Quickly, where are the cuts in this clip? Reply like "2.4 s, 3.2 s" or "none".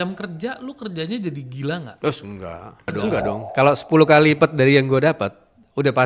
3.4 s